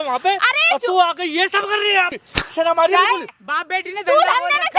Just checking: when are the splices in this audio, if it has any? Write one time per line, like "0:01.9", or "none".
0:02.1
0:03.3